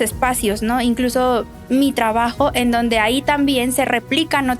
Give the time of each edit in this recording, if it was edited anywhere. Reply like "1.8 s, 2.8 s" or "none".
2.3 s